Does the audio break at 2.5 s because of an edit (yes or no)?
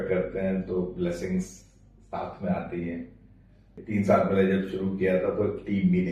no